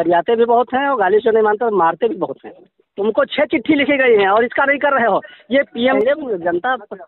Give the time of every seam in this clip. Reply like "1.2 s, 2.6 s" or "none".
2.6 s, 6.0 s